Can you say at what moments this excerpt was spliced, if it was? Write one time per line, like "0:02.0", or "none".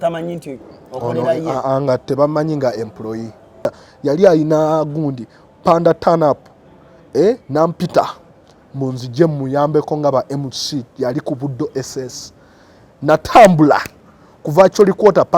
0:03.8